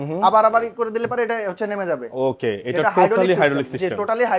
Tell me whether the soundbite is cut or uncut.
uncut